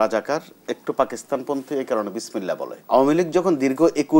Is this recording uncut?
no; 1 cut; at 2.7 s

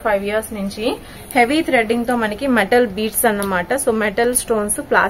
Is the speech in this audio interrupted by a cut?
yes; 1 cut; at 1.1 s

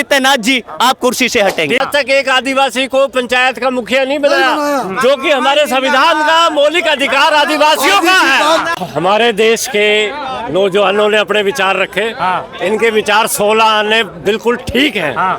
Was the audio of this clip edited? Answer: yes; 2 cuts; at 1.8 s, 8.7 s

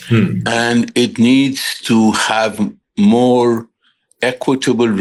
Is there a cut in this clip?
no; 0 cuts

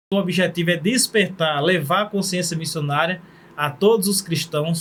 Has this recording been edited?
no; 0 cuts

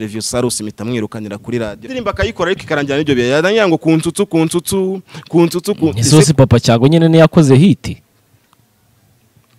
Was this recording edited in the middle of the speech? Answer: yes; 1 cut; at 1.8 s

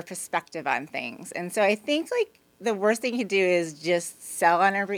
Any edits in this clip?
no; 0 cuts

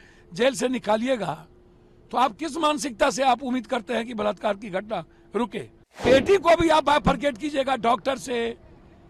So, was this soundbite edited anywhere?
yes; 1 cut; at 6.0 s

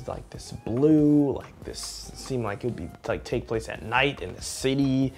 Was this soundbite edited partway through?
no; 0 cuts

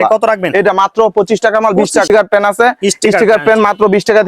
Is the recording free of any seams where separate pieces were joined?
no; 1 cut; at 2.1 s

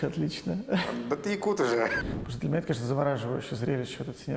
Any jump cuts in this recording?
yes; 1 cut; at 1.9 s

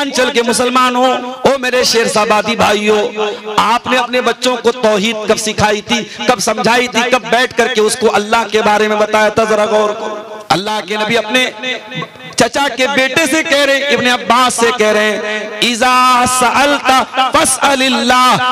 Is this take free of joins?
no; 2 cuts; at 1.3 s, 10.3 s

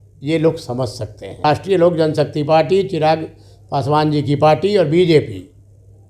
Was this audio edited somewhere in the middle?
yes; 1 cut; at 1.4 s

